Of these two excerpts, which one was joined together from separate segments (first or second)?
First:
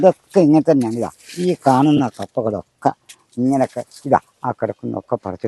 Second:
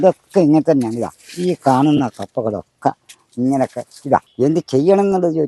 second